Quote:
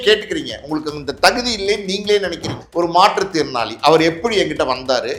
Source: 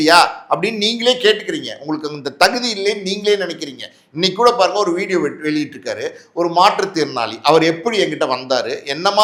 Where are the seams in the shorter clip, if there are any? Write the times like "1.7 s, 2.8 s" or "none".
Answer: 2.6 s